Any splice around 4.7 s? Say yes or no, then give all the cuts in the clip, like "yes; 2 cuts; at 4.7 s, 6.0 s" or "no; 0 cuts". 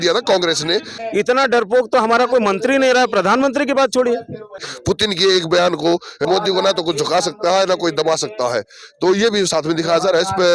yes; 3 cuts; at 0.9 s, 4.7 s, 6.2 s